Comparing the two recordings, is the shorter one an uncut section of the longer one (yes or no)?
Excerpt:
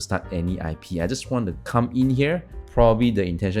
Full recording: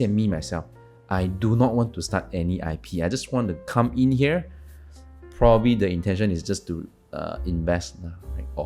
no